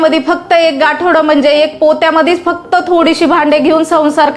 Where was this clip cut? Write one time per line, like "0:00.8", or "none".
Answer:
none